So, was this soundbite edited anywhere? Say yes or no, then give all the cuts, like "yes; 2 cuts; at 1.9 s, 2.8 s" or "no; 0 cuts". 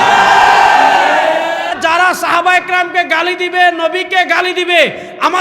yes; 1 cut; at 1.8 s